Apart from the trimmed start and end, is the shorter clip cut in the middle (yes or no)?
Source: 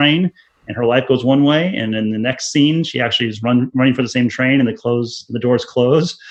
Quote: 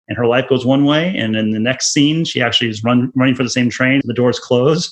yes